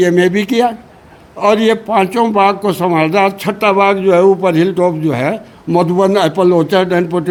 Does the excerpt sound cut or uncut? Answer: uncut